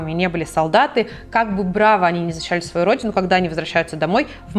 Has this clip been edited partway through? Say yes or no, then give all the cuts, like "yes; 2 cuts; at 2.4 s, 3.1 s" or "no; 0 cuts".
no; 0 cuts